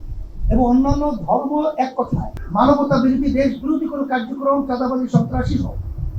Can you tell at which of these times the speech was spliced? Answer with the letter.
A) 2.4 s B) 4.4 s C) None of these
A